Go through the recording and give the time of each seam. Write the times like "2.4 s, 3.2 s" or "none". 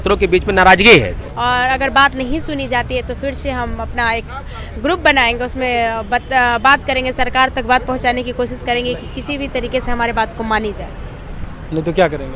1.2 s